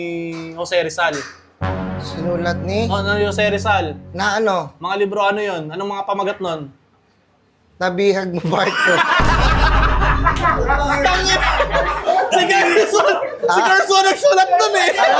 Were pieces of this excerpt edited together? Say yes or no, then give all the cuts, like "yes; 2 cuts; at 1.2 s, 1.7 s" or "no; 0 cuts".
no; 0 cuts